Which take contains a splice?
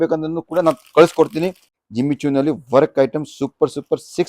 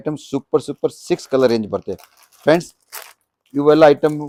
first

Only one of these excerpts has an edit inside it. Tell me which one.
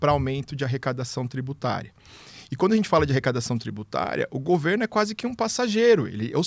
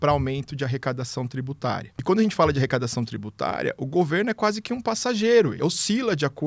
second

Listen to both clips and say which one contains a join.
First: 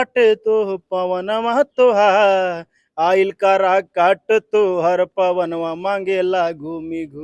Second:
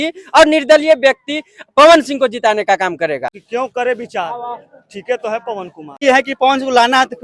second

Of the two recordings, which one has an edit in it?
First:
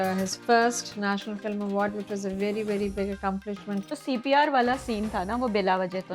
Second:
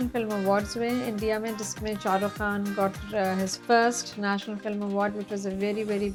first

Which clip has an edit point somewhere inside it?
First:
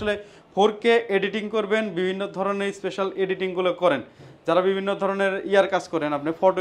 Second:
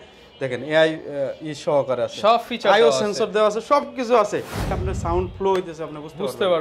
second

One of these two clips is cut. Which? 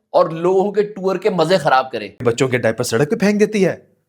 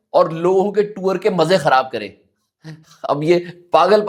first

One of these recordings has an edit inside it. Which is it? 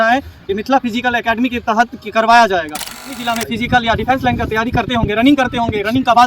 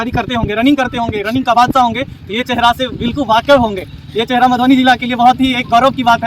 first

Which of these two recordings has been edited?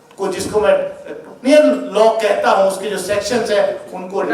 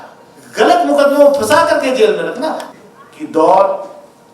second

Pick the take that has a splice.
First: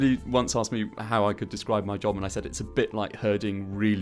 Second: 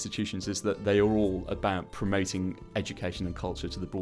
first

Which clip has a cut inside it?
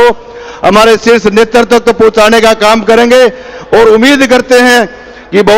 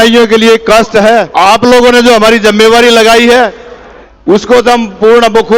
second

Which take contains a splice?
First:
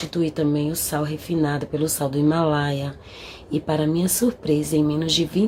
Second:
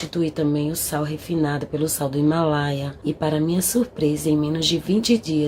second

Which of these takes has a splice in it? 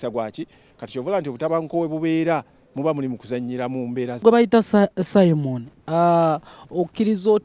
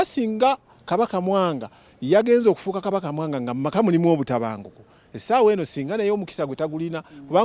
first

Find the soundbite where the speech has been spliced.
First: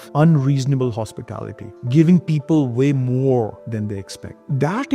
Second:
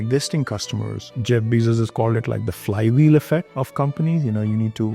second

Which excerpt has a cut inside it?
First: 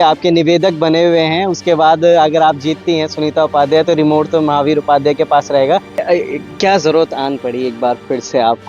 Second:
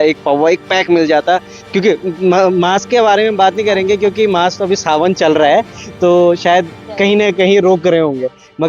first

